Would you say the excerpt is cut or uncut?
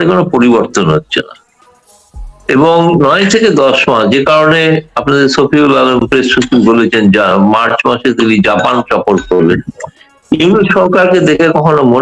uncut